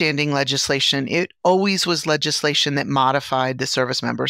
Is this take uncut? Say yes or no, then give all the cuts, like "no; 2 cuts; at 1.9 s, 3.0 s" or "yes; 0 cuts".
yes; 0 cuts